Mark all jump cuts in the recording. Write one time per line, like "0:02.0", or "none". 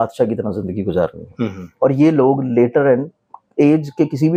none